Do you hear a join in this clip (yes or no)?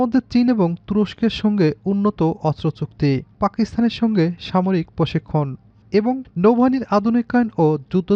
no